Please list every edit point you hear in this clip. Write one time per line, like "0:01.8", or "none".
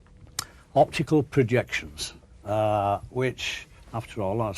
0:03.5